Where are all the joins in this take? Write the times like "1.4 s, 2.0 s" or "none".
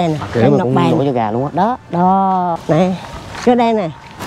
2.6 s